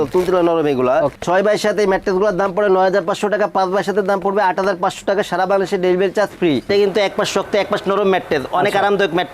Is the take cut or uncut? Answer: cut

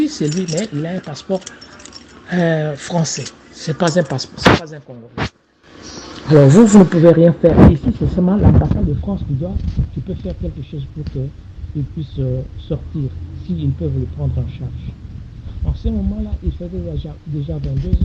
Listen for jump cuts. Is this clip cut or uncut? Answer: uncut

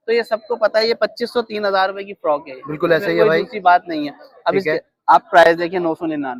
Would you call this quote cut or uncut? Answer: uncut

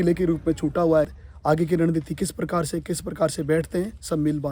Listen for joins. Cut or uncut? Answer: cut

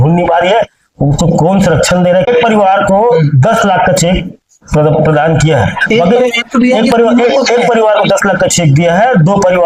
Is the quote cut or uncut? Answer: cut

